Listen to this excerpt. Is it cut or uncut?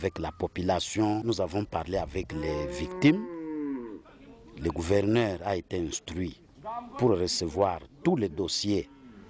cut